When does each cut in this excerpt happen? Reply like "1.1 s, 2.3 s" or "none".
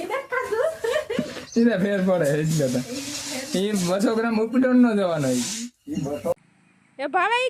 6.3 s